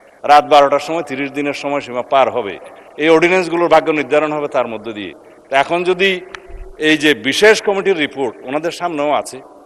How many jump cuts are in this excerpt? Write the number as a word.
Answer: zero